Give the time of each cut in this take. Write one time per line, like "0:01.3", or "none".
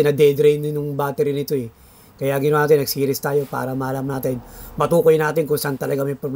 none